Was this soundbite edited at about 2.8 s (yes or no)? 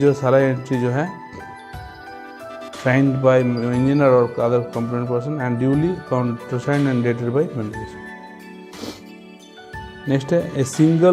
yes